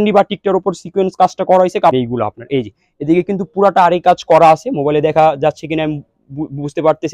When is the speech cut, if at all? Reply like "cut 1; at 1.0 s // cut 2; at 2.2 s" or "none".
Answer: cut 1; at 2.0 s